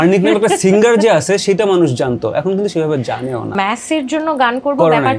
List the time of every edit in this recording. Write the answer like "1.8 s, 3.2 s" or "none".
3.5 s